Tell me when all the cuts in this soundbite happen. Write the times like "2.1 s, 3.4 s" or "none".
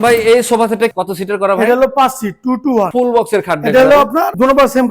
1.0 s, 2.9 s